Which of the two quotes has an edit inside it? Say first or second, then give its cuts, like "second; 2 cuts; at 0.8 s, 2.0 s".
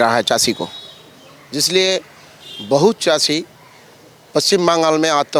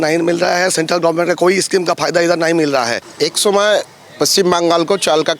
second; 1 cut; at 3.0 s